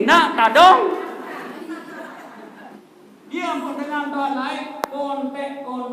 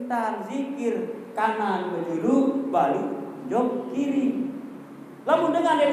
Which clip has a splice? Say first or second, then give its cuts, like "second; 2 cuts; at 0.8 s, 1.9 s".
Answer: first; 1 cut; at 2.8 s